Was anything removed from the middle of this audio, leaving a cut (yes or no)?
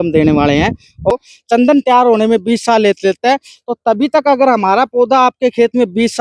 yes